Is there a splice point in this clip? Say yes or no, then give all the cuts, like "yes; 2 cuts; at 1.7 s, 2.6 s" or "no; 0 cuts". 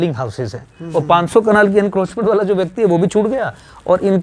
no; 0 cuts